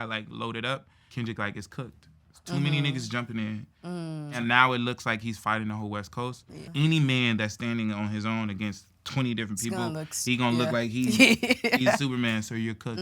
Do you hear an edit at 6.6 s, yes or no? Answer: yes